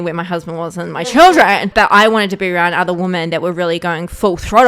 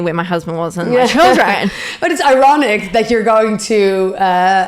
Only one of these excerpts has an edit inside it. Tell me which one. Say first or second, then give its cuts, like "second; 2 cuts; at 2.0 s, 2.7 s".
first; 1 cut; at 1.7 s